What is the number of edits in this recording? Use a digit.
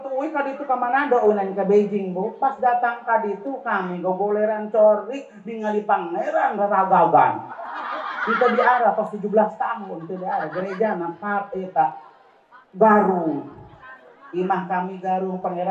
0